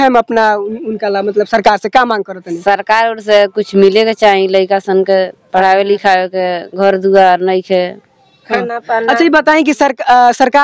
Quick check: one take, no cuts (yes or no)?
yes